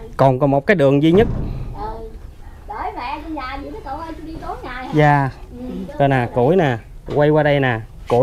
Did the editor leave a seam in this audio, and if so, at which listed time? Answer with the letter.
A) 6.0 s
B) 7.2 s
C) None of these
C